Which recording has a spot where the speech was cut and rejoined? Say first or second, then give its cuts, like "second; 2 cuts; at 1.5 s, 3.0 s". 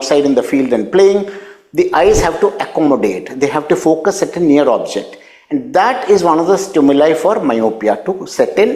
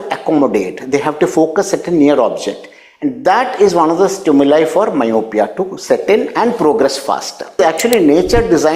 second; 1 cut; at 7.6 s